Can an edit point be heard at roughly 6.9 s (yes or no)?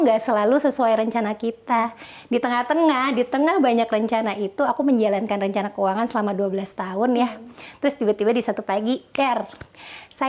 no